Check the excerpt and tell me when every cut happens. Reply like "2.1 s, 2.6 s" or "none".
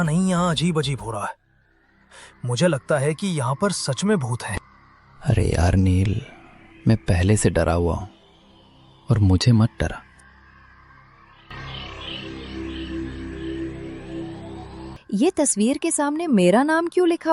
14.9 s